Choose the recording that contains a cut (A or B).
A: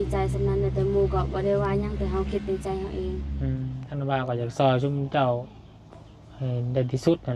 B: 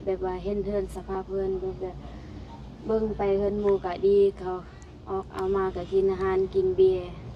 A